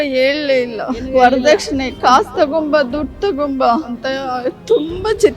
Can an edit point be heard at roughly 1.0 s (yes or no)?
yes